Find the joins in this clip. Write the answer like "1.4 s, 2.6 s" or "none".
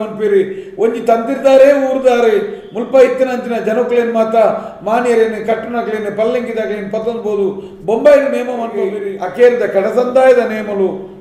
9.0 s